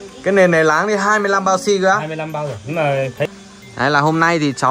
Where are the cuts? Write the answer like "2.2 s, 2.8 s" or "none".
3.3 s